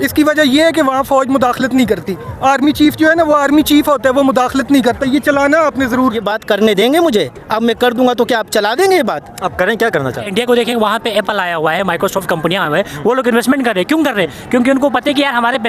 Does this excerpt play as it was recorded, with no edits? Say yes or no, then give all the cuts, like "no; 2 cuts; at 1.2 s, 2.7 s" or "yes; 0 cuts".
no; 2 cuts; at 6.3 s, 10.3 s